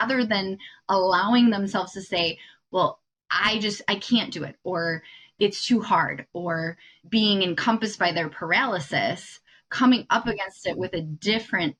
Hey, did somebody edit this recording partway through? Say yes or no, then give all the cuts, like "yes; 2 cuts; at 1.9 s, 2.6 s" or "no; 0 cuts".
no; 0 cuts